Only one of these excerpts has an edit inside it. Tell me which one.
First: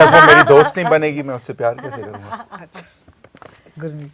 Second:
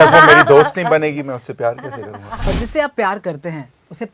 second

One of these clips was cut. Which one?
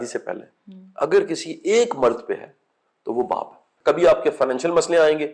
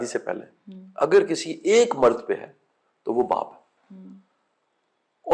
first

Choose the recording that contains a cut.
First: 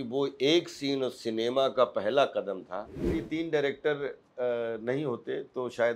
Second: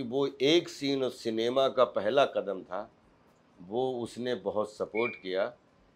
first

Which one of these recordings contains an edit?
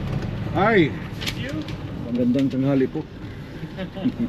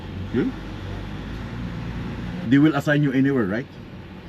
second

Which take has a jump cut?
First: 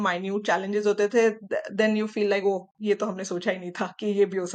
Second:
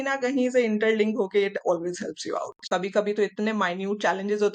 second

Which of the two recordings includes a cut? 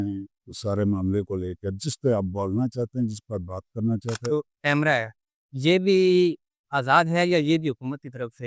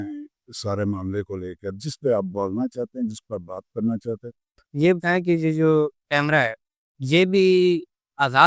first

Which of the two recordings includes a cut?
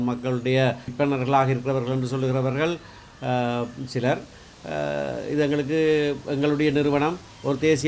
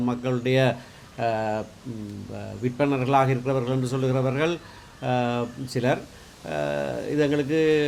first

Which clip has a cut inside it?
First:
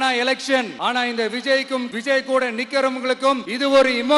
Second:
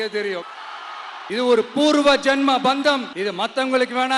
second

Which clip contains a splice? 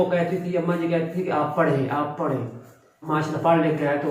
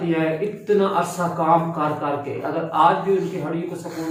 first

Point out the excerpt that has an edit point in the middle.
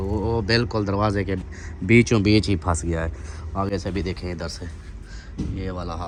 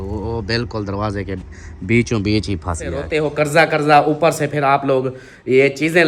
second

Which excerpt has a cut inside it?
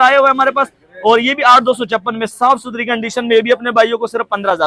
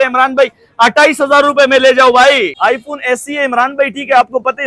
second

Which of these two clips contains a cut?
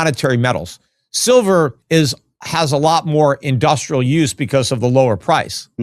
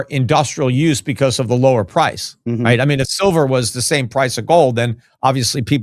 first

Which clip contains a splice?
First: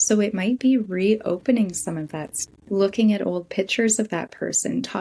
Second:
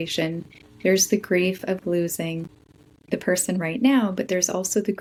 first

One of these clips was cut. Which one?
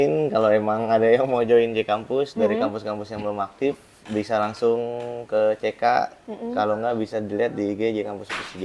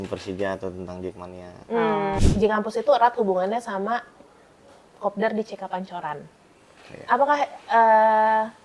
second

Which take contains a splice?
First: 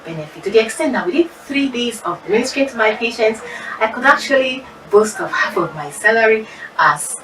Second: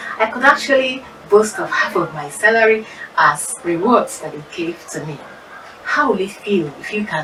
first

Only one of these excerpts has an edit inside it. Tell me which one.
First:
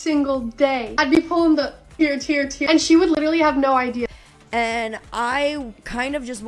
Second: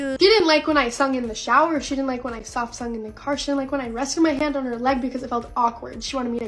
first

